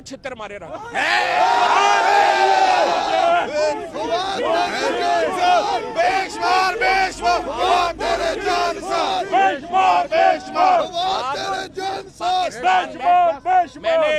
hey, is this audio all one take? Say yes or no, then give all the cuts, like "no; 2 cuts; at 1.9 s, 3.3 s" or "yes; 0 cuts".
yes; 0 cuts